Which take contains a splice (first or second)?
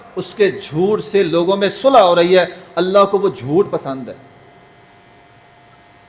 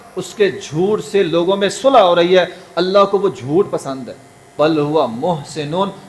second